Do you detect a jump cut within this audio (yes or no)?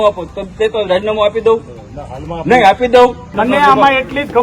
yes